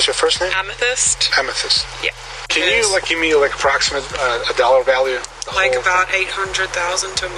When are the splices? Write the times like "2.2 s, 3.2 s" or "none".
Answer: 2.4 s